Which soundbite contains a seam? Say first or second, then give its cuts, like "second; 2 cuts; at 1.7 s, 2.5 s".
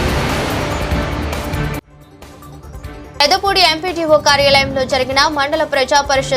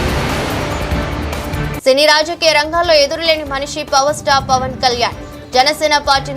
second; 1 cut; at 1.7 s